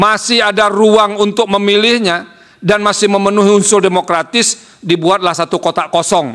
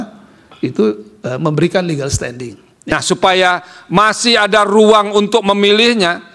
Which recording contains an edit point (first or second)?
second